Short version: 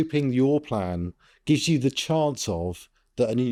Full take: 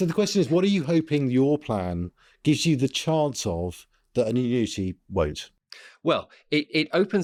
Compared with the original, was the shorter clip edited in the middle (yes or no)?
no